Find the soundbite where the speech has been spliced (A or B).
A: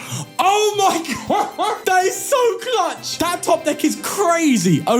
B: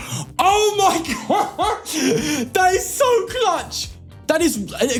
A